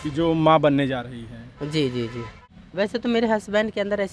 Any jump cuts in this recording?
yes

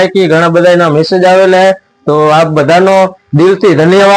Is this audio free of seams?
yes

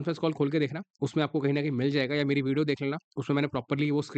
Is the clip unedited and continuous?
yes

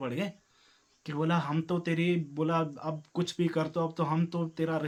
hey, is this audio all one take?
yes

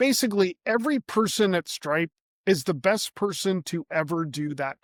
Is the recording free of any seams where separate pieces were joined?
yes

